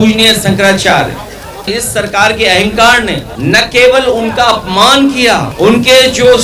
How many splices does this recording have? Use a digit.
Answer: 3